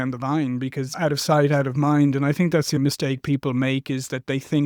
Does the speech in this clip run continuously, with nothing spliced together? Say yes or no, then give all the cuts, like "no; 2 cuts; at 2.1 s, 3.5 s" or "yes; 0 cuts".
no; 2 cuts; at 0.9 s, 2.8 s